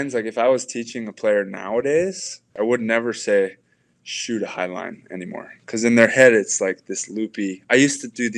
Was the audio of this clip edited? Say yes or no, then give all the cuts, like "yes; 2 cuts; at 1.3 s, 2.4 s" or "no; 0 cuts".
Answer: yes; 1 cut; at 2.5 s